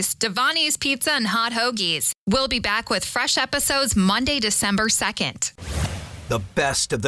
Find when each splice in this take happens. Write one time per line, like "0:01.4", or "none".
0:05.4